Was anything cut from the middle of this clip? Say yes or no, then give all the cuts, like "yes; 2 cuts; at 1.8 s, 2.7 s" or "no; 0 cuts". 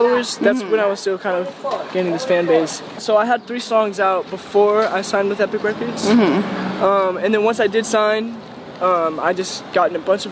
yes; 1 cut; at 3.0 s